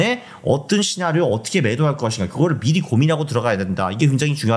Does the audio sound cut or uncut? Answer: uncut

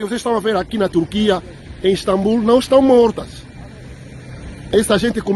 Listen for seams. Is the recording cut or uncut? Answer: uncut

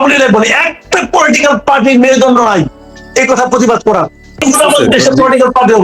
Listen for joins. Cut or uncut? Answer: cut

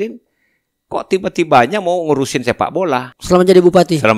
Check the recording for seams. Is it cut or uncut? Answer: cut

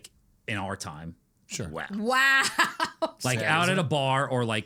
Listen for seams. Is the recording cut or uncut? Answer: uncut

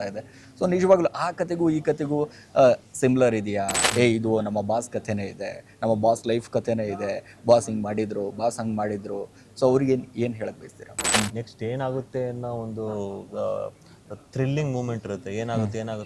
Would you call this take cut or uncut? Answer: cut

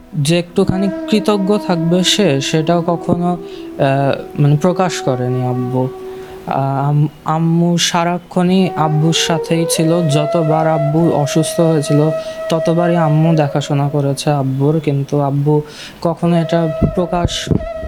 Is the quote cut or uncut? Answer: uncut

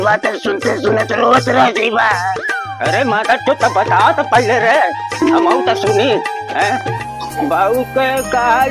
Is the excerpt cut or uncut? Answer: cut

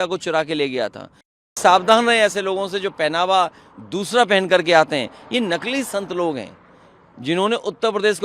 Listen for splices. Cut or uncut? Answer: cut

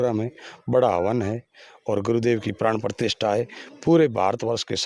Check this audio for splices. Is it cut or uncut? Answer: uncut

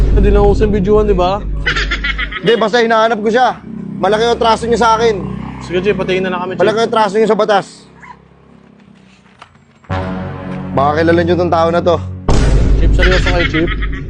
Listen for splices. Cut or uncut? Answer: uncut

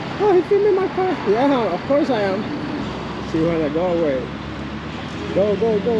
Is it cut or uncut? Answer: cut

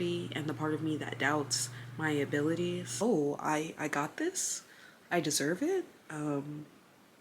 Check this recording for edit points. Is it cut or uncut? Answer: cut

